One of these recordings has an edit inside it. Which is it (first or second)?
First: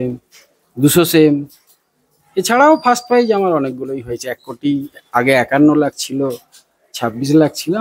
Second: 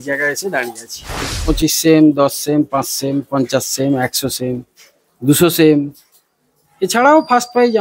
second